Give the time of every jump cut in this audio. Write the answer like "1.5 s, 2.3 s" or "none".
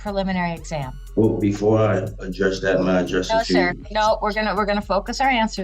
1.0 s

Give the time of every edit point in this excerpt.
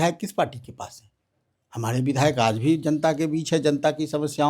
none

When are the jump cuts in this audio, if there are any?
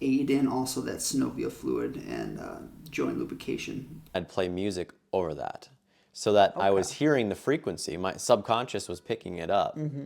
4.1 s

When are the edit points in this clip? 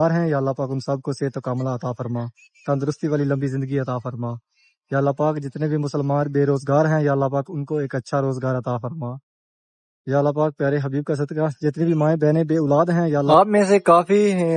13.3 s

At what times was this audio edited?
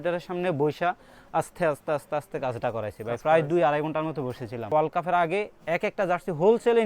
4.7 s

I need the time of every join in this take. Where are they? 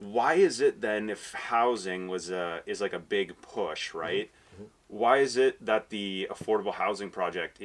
none

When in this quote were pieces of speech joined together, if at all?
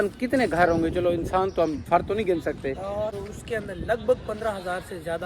3.1 s

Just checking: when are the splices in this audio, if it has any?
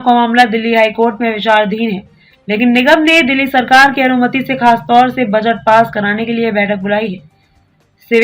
none

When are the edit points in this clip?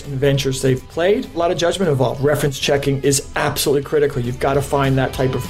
1.3 s

